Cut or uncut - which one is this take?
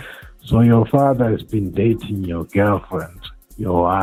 uncut